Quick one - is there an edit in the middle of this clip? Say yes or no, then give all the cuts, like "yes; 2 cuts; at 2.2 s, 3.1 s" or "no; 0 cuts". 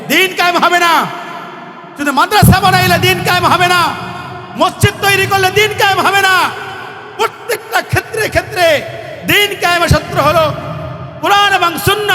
no; 0 cuts